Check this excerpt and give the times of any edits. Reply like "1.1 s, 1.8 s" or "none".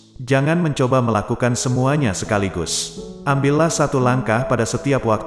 none